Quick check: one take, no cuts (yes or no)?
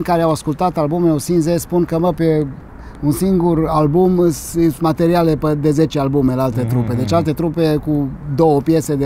yes